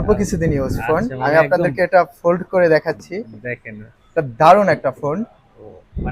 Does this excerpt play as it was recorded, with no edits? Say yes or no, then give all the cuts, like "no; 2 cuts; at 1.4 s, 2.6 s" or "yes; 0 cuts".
yes; 0 cuts